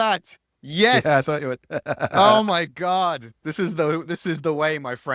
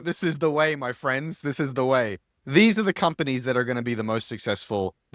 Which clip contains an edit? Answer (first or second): second